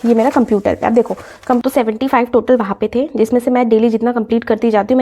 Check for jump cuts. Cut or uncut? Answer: cut